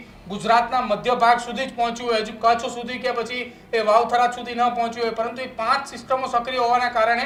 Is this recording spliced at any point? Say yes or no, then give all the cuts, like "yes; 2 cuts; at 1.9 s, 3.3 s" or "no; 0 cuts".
no; 0 cuts